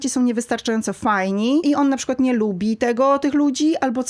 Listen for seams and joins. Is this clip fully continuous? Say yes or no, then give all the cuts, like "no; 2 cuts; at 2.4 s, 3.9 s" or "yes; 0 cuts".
no; 1 cut; at 1.6 s